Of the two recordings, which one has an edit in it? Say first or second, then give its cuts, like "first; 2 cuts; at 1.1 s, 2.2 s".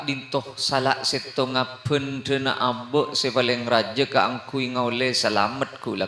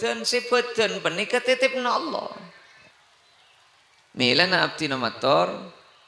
second; 1 cut; at 2.9 s